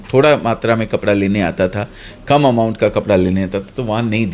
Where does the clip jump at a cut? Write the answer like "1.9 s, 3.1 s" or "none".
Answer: none

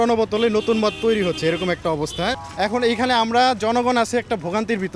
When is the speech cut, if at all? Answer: 2.5 s

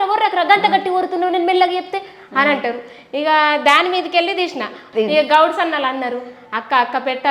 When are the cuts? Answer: 4.8 s

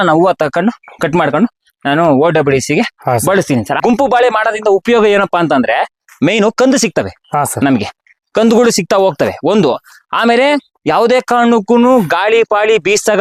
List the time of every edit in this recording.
3.8 s

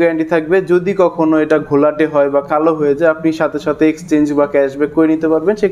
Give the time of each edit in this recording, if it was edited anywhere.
none

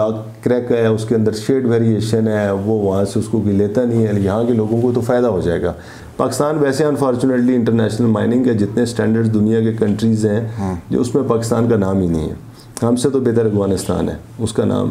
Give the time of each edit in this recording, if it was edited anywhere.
6.0 s

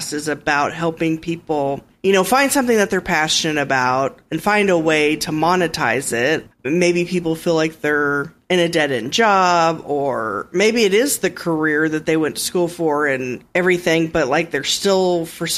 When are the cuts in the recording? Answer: 1.9 s, 6.4 s

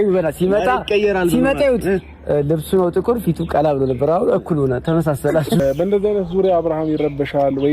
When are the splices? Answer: 5.6 s

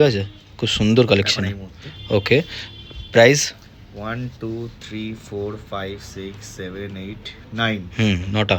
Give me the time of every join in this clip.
none

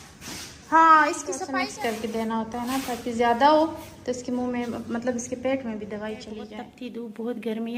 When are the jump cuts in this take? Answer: 1.3 s, 6.7 s

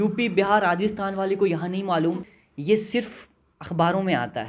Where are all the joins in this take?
2.4 s

